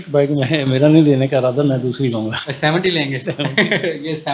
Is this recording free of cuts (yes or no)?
yes